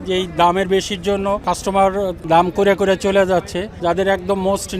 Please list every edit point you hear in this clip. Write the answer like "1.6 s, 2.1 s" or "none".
1.4 s, 2.2 s, 3.7 s